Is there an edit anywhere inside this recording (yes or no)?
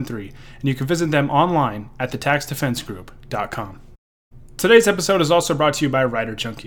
no